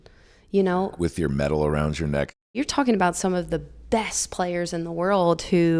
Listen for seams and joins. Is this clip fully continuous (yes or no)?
no